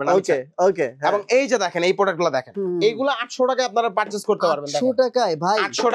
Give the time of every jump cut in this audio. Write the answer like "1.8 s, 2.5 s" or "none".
2.5 s